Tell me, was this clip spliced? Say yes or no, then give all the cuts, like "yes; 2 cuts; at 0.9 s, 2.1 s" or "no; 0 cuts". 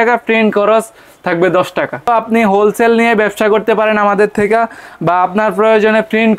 yes; 1 cut; at 2.1 s